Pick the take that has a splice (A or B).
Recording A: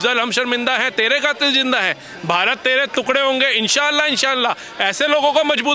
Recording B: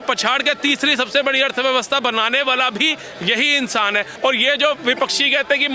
B